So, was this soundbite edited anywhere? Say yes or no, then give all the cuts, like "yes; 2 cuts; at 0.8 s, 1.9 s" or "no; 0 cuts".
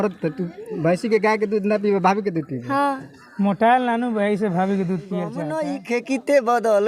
yes; 1 cut; at 5.6 s